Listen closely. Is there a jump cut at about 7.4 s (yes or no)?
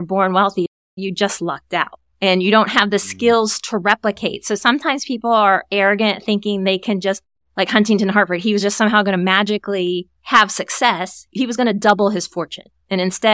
no